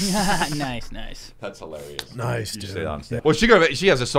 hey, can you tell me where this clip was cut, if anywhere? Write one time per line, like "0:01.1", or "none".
0:03.2